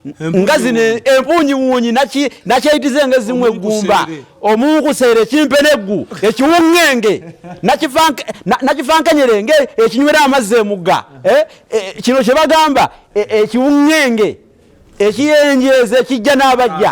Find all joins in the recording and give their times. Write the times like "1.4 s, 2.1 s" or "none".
none